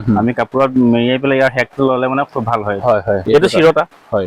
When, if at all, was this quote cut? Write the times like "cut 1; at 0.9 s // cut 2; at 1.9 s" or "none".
none